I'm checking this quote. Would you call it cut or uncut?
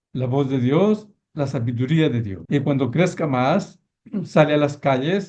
cut